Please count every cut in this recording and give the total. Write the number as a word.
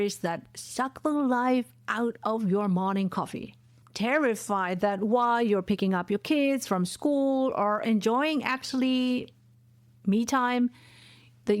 one